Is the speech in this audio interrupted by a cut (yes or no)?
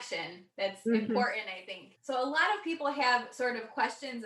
yes